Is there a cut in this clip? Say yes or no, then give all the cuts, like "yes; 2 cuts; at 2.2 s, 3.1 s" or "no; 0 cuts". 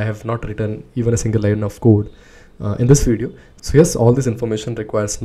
no; 0 cuts